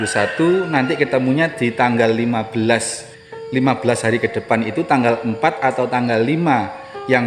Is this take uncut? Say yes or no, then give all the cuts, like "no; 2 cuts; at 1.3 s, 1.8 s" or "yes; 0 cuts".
yes; 0 cuts